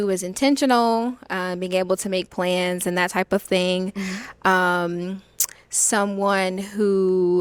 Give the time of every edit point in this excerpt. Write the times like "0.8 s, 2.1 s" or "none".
none